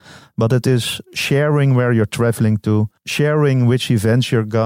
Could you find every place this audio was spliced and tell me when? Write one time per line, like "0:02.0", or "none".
0:03.0